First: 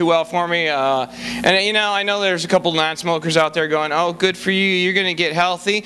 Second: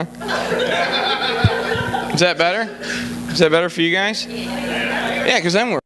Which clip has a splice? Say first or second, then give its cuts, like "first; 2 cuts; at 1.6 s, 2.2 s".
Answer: first; 1 cut; at 1.5 s